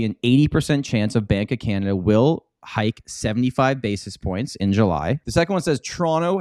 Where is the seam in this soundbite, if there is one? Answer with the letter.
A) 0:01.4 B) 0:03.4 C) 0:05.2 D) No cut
C